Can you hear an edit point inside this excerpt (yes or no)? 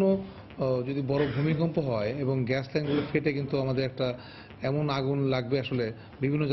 no